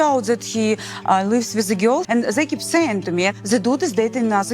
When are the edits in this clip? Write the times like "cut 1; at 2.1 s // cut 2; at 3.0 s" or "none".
cut 1; at 2.0 s